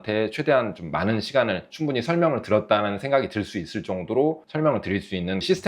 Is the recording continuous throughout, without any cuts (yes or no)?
no